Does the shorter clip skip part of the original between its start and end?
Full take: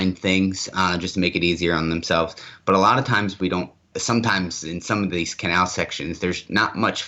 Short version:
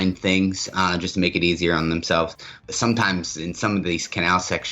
yes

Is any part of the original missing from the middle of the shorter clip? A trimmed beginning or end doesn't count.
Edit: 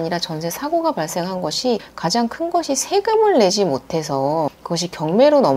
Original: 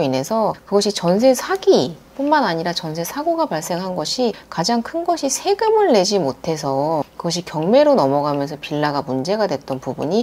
no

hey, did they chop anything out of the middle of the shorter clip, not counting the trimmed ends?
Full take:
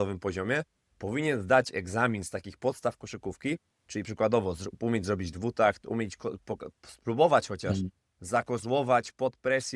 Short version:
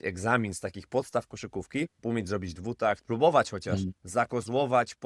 yes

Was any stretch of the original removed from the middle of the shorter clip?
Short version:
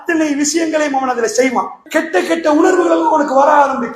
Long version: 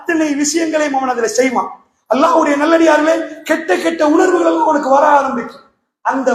yes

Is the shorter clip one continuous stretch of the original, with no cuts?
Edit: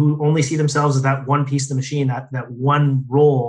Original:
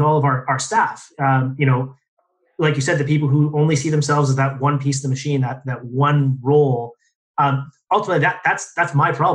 yes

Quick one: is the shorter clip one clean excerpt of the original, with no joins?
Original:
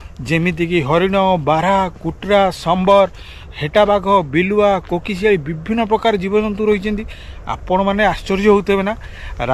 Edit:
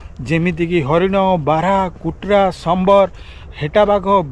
yes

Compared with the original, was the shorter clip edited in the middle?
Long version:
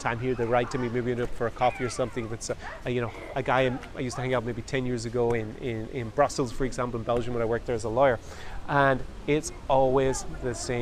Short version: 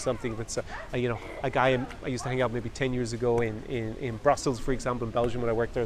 no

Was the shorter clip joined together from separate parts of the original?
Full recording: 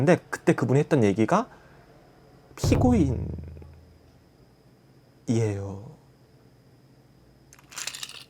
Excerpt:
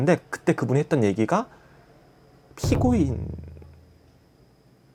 no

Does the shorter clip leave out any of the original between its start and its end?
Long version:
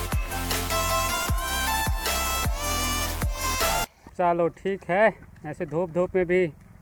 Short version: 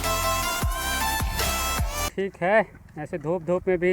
yes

